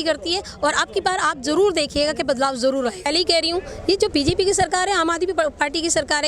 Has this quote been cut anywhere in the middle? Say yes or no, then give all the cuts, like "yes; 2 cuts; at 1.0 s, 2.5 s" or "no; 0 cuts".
yes; 1 cut; at 3.1 s